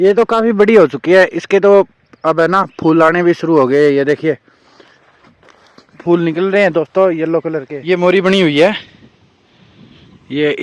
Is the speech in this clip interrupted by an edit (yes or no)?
yes